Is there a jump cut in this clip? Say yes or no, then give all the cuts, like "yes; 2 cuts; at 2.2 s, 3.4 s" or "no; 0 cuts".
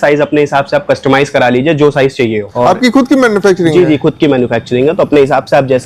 no; 0 cuts